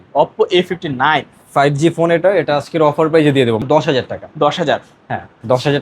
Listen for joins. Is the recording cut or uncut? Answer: cut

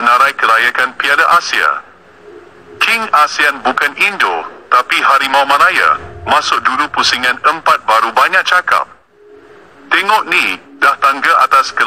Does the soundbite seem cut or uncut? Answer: uncut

